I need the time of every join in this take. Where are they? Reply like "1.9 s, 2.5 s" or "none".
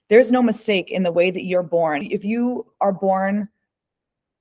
2.0 s